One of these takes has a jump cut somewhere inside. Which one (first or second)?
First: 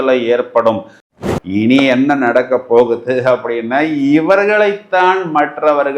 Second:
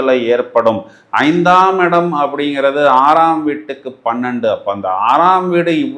first